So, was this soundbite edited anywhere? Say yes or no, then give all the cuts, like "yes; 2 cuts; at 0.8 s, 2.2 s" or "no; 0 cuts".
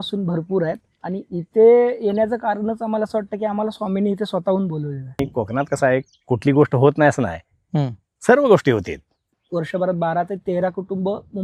yes; 2 cuts; at 5.2 s, 9.4 s